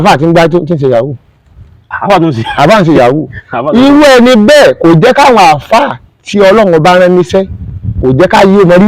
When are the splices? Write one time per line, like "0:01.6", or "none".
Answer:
none